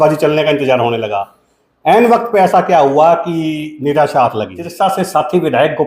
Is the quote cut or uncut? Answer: cut